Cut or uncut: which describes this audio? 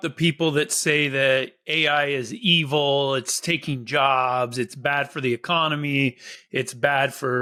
uncut